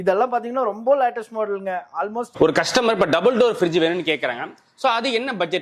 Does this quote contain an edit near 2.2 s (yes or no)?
yes